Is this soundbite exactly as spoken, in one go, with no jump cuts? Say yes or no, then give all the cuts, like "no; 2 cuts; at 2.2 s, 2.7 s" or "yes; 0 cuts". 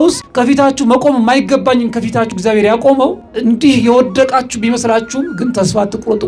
yes; 0 cuts